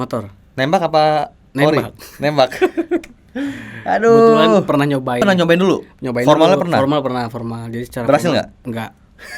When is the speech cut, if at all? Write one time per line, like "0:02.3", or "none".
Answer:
0:05.2

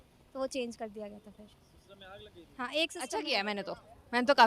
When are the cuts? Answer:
0:03.1

